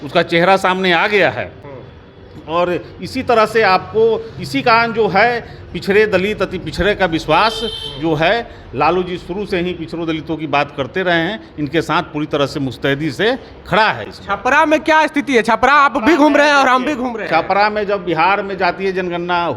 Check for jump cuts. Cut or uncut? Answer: uncut